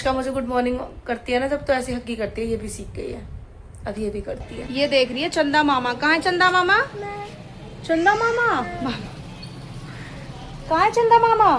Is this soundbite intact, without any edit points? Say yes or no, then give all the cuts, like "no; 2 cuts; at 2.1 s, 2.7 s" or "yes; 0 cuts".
no; 2 cuts; at 4.7 s, 8.8 s